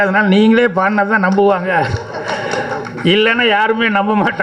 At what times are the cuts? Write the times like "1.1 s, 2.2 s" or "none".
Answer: none